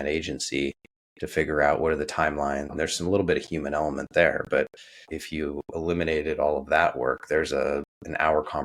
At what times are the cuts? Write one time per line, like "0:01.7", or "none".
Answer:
0:02.7